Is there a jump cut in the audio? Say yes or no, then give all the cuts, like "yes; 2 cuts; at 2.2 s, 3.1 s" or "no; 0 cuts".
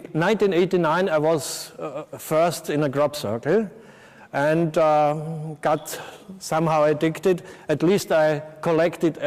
yes; 1 cut; at 2.5 s